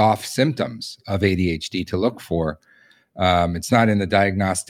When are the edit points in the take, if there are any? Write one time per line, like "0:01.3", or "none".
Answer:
none